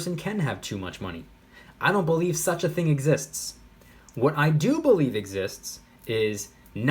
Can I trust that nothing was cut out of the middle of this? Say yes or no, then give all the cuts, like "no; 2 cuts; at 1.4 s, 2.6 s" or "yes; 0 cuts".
yes; 0 cuts